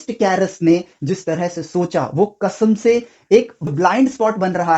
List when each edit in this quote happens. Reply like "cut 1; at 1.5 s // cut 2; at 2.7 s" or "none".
cut 1; at 3.7 s